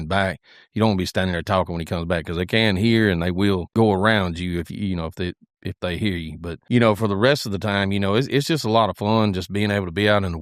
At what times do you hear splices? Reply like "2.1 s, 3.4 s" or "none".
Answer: 3.7 s, 6.6 s